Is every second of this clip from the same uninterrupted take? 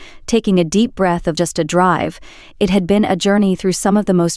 no; 1 cut; at 1.4 s

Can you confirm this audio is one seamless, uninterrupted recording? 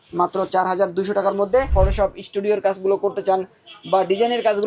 no; 1 cut; at 1.7 s

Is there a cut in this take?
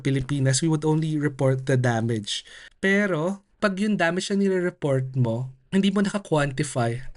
yes; 3 cuts; at 2.8 s, 3.6 s, 5.5 s

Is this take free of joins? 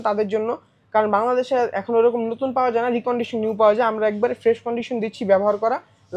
yes; 0 cuts

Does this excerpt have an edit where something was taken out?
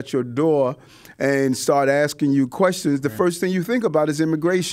no; 0 cuts

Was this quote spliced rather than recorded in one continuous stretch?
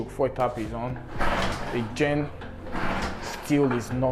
no; 0 cuts

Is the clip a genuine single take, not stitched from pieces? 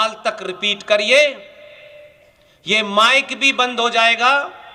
yes; 0 cuts

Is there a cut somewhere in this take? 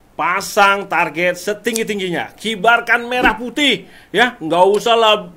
no; 0 cuts

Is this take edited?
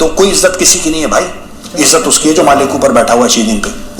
no; 0 cuts

